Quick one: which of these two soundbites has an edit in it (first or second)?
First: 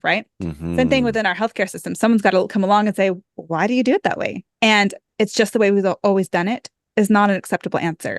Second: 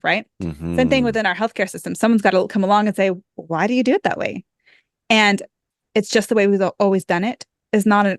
first